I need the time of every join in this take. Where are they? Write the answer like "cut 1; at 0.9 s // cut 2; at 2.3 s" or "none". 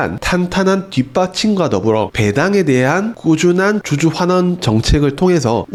none